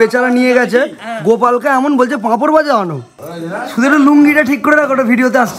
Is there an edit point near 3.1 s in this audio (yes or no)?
yes